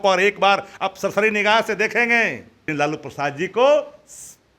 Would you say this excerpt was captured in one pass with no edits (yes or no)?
no